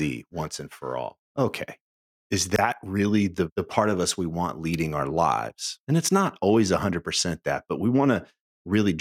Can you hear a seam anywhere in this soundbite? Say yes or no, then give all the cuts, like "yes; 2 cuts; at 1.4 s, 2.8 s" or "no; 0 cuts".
no; 0 cuts